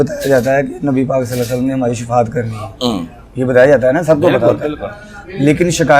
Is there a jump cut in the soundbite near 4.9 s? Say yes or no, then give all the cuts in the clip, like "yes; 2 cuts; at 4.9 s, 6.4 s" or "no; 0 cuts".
no; 0 cuts